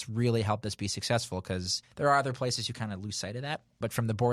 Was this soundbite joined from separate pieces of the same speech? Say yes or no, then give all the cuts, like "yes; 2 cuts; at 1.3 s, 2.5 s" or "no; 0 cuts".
yes; 1 cut; at 1.8 s